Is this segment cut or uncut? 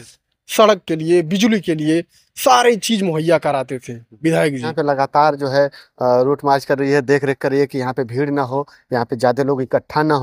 cut